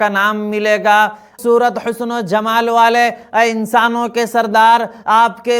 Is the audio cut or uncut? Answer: cut